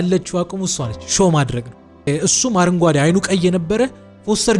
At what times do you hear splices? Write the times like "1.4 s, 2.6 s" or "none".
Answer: 2.1 s